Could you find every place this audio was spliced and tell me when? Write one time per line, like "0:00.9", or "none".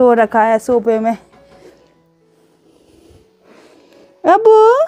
none